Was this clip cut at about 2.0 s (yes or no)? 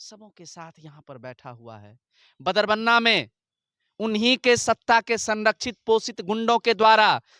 no